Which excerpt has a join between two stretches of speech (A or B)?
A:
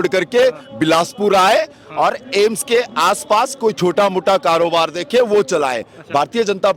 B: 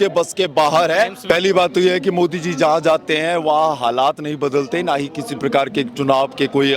B